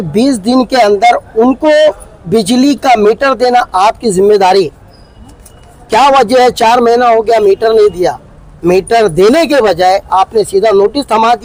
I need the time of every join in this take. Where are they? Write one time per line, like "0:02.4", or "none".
none